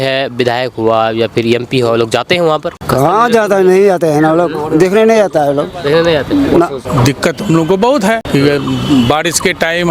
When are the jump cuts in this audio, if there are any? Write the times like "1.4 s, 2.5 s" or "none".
2.7 s, 6.8 s, 8.2 s